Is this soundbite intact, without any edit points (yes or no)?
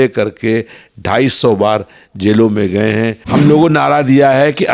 no